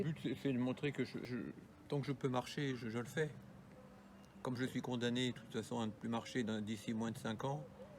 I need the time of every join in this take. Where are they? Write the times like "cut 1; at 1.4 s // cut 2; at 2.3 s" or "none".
cut 1; at 1.3 s